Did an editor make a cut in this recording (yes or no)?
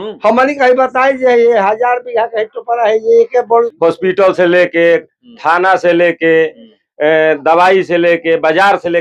yes